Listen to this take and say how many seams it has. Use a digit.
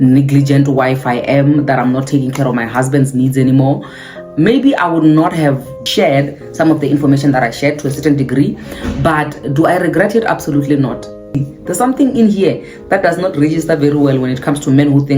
2